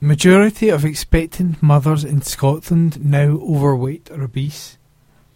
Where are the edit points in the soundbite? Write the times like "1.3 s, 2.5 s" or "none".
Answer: none